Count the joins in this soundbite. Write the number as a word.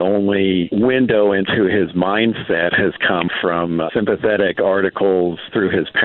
one